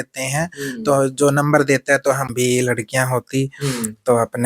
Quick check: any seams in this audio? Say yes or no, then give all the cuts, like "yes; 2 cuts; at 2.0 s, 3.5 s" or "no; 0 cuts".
yes; 1 cut; at 2.3 s